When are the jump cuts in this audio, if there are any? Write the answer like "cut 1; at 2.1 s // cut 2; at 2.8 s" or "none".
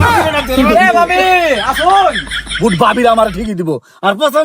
cut 1; at 2.4 s